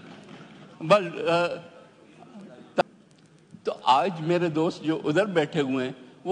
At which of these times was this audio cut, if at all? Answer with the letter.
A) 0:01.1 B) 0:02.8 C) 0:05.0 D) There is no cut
B